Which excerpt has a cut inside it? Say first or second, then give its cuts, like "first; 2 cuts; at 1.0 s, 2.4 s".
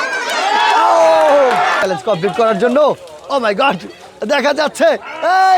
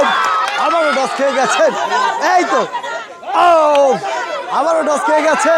first; 1 cut; at 1.8 s